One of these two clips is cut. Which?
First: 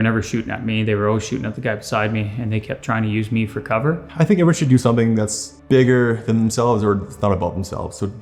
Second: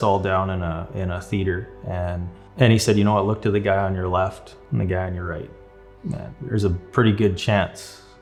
first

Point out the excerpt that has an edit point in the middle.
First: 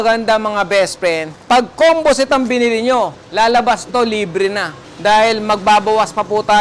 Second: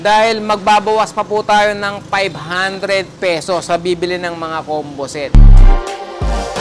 second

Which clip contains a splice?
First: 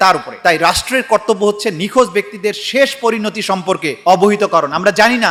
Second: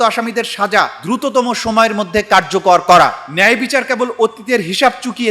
second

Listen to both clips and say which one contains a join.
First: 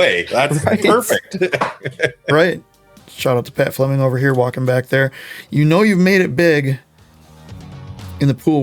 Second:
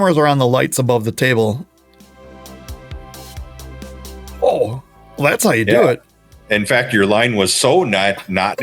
first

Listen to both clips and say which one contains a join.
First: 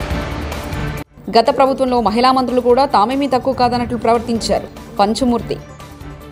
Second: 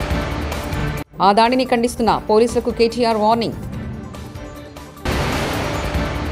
first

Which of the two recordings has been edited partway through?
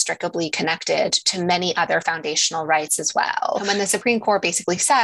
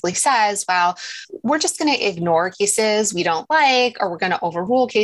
first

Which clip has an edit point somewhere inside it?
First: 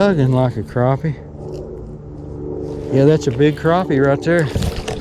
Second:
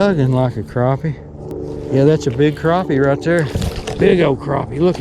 second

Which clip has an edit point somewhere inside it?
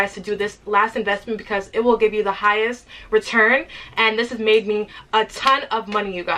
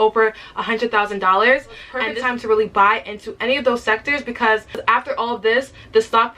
second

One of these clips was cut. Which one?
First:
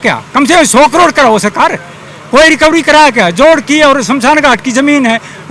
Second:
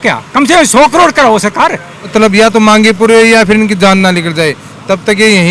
second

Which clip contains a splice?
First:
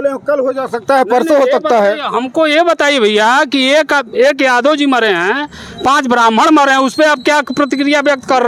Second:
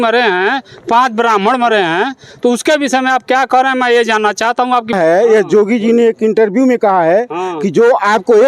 second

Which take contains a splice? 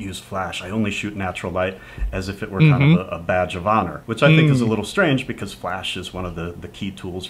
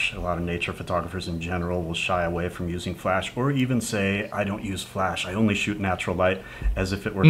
first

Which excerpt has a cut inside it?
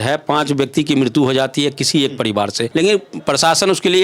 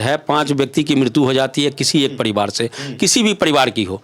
first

